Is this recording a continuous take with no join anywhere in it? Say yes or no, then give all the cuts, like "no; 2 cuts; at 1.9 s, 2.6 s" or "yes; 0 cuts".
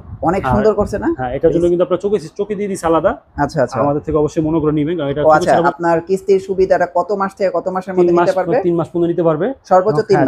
no; 1 cut; at 5.7 s